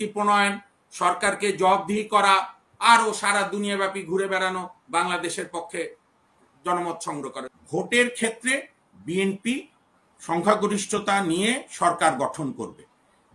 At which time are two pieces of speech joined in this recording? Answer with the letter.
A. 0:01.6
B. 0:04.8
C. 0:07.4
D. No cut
C